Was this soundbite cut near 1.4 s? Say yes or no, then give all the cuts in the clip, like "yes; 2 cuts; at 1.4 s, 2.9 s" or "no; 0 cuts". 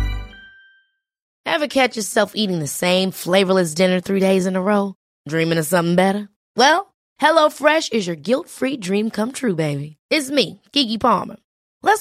yes; 1 cut; at 1.4 s